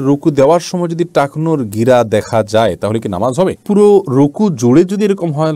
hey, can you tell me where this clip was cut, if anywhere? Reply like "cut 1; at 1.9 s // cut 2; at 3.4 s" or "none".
none

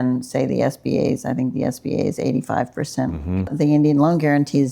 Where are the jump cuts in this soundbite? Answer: cut 1; at 3.5 s

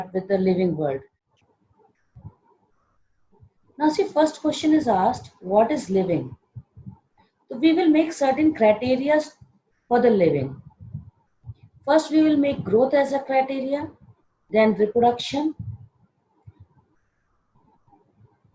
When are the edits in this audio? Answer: cut 1; at 1.2 s

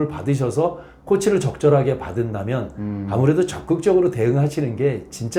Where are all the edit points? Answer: none

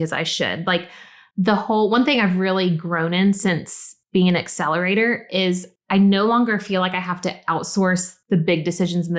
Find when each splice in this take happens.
none

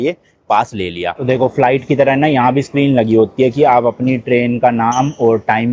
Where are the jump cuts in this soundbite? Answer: cut 1; at 1.2 s

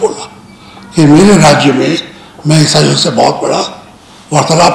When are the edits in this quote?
none

